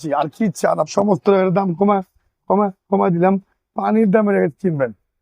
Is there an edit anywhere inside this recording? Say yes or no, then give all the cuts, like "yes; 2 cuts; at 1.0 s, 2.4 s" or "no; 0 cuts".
yes; 1 cut; at 0.9 s